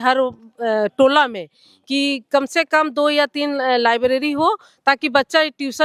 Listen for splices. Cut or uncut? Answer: uncut